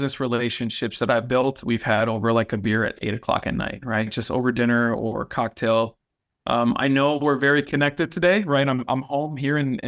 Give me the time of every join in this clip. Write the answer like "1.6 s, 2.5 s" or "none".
none